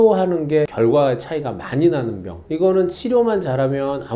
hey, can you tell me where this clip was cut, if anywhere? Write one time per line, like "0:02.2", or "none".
none